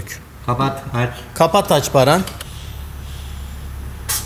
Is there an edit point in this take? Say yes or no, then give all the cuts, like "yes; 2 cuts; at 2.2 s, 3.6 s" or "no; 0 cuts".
yes; 1 cut; at 2.5 s